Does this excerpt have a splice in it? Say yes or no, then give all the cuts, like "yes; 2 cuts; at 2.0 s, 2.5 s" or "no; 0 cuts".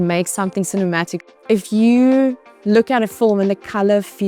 yes; 1 cut; at 1.2 s